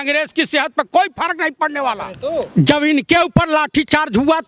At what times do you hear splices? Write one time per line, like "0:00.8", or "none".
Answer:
0:02.1